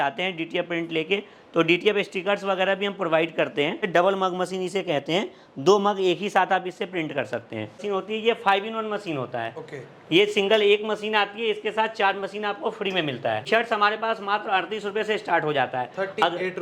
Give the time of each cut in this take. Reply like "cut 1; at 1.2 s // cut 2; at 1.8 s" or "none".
cut 1; at 3.9 s // cut 2; at 7.8 s // cut 3; at 13.5 s